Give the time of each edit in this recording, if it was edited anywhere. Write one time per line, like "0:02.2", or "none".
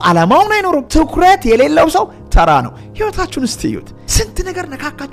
0:00.8
0:04.0